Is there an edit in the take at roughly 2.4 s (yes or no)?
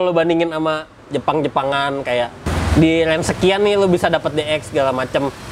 yes